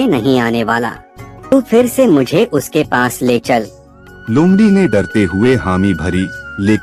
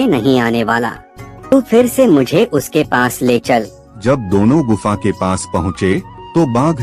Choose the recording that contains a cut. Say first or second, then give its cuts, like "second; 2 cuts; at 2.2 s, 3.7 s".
second; 1 cut; at 4.0 s